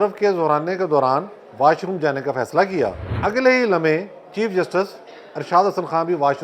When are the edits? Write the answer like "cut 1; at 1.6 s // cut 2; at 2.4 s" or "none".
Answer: cut 1; at 3.1 s